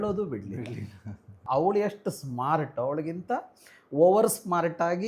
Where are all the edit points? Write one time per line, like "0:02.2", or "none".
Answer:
0:01.3